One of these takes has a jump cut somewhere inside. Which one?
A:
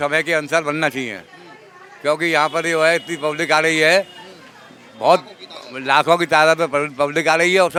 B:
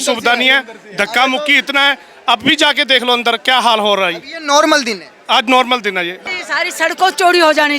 B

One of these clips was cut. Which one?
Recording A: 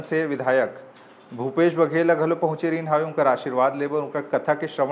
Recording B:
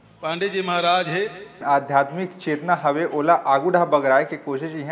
B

